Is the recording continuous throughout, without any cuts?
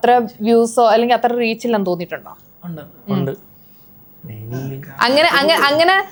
yes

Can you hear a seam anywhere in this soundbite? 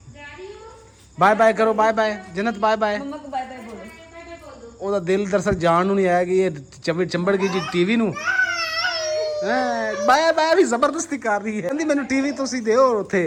no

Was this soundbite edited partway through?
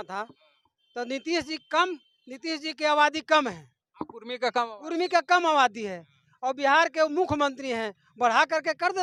no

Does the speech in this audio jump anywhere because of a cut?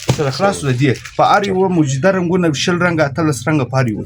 no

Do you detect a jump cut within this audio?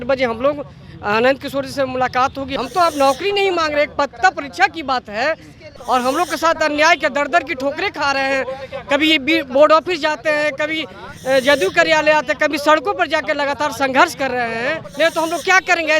yes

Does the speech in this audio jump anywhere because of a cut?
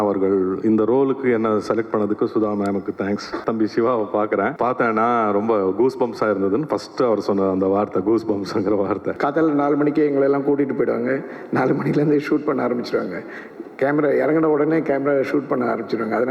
yes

